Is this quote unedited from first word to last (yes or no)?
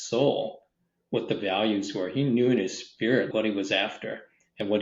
no